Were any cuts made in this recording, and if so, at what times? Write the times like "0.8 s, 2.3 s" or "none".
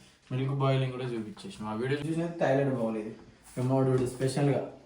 2.0 s